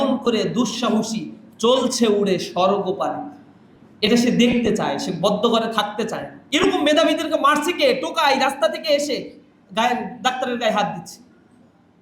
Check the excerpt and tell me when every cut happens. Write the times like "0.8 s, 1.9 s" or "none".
6.4 s

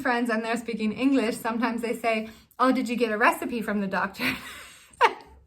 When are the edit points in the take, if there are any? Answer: 1.4 s

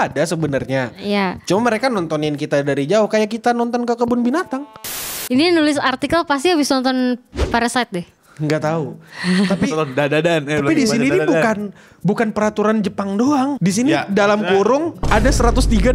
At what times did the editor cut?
5.0 s, 13.6 s, 15.0 s

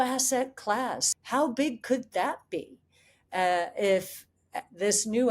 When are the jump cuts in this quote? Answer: 1.0 s

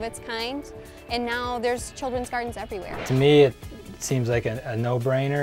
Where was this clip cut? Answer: 3.0 s

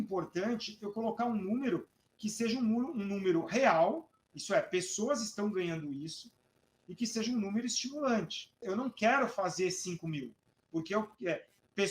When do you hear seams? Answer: 8.6 s

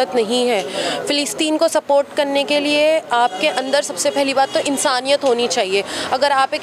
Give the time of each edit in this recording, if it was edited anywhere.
none

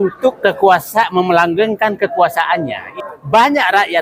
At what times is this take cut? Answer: 2.9 s

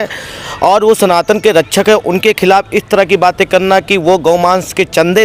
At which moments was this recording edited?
none

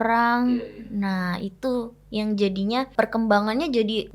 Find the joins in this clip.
2.9 s

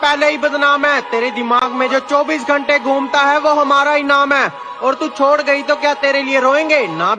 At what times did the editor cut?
none

